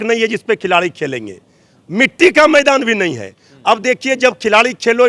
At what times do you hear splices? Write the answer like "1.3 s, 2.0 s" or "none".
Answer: none